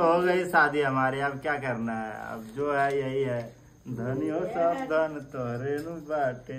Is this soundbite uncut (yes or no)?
yes